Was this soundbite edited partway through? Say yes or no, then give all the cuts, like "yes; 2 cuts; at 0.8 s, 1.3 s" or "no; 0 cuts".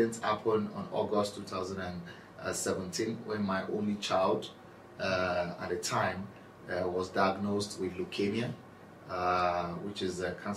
no; 0 cuts